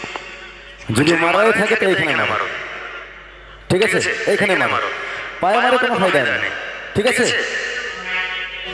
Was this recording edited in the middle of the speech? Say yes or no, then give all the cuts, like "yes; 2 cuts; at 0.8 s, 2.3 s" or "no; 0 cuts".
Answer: no; 0 cuts